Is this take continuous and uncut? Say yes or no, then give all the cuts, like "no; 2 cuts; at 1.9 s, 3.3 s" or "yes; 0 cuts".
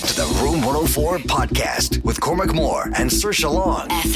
yes; 0 cuts